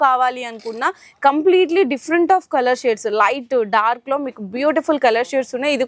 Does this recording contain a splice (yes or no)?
no